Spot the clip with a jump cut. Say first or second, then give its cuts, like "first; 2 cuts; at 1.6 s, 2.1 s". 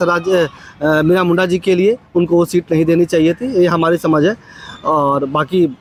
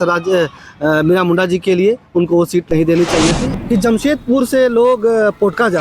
second; 1 cut; at 3.4 s